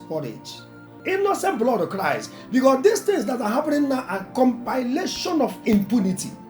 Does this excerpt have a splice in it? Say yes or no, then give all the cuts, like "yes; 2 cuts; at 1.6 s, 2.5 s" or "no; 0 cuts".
yes; 1 cut; at 0.9 s